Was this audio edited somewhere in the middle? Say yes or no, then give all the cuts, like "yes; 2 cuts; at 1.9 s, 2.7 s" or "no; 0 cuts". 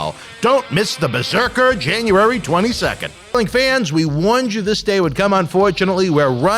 yes; 1 cut; at 3.3 s